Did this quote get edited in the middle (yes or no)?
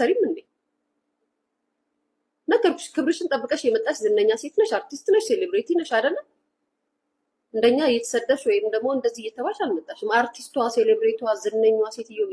no